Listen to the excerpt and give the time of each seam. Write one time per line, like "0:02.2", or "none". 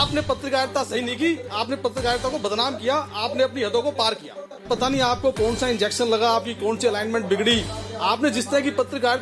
0:04.6